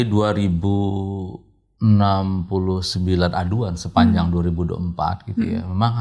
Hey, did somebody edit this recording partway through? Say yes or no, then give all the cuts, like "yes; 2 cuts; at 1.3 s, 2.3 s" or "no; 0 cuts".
no; 0 cuts